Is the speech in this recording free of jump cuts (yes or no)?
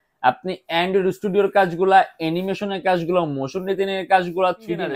yes